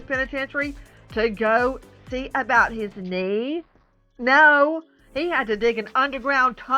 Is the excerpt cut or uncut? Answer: uncut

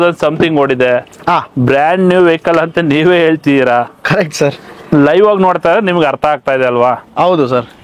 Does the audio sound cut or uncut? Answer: uncut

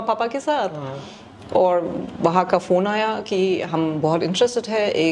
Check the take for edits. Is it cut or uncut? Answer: uncut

